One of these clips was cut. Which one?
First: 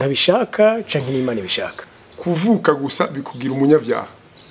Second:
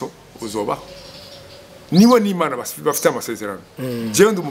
first; 1 cut; at 1.7 s

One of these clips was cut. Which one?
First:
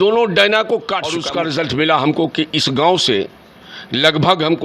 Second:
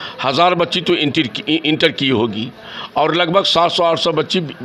first; 1 cut; at 1.2 s

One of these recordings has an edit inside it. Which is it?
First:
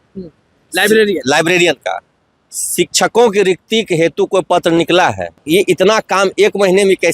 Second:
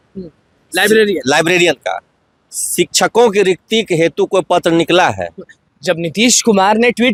first; 1 cut; at 5.0 s

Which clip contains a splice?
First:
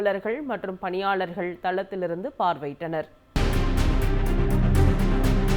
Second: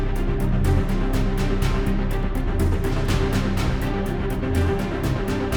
first; 1 cut; at 3.2 s

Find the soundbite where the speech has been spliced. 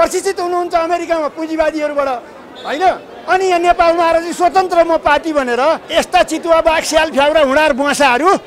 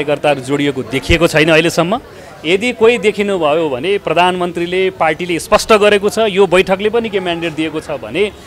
first; 1 cut; at 5.8 s

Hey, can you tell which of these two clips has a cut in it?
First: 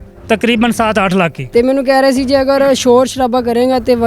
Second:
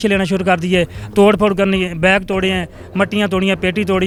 first; 1 cut; at 1.4 s

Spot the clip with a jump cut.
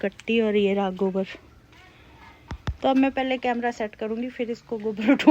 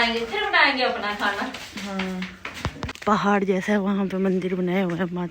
second; 1 cut; at 3.0 s

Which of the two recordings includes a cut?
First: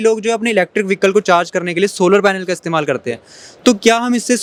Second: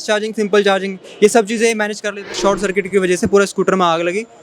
second; 1 cut; at 2.4 s

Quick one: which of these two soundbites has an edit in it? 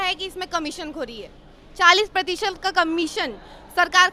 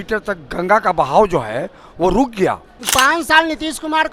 second; 1 cut; at 2.8 s

